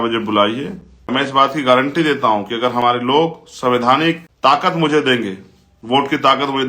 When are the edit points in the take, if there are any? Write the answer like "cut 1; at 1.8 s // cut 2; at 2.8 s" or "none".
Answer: cut 1; at 1.1 s // cut 2; at 4.3 s